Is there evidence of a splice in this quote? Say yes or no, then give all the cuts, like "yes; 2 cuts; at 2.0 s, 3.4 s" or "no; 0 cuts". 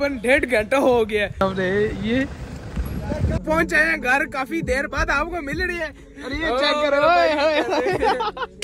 yes; 2 cuts; at 1.4 s, 3.4 s